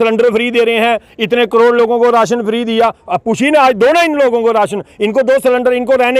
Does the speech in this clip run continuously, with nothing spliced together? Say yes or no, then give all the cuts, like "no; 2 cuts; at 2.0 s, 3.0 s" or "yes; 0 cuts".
yes; 0 cuts